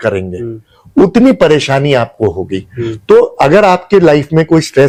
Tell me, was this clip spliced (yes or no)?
no